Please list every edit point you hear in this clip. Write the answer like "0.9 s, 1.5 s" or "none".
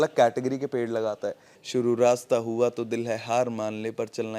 1.5 s